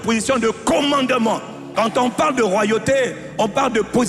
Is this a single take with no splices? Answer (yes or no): no